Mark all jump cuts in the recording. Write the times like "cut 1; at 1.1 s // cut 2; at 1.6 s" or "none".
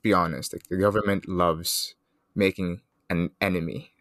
cut 1; at 2.9 s